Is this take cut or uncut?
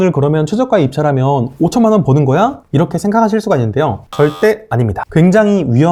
uncut